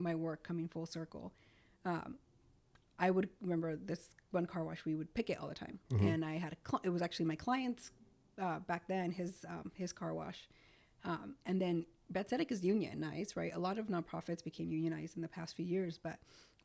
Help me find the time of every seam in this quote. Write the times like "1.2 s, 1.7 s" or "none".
none